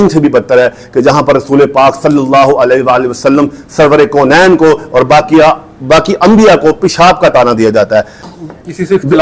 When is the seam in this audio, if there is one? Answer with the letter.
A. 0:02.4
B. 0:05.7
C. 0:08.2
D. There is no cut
C